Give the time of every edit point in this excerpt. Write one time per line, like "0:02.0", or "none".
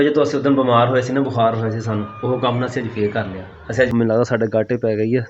0:03.9